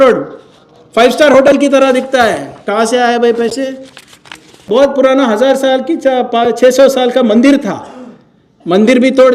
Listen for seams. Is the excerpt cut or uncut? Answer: cut